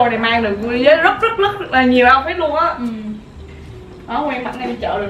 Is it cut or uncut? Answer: cut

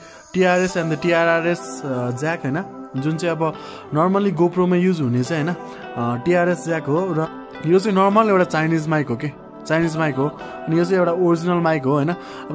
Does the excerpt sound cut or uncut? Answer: cut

